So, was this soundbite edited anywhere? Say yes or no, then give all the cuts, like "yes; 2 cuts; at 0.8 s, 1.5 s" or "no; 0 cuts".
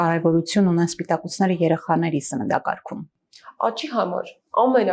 no; 0 cuts